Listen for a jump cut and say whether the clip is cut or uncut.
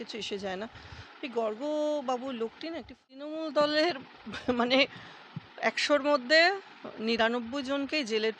cut